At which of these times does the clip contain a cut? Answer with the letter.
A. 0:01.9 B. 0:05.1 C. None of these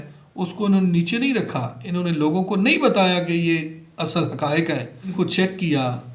B